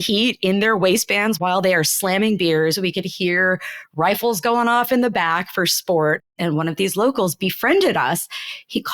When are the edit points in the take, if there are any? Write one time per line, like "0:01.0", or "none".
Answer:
0:06.3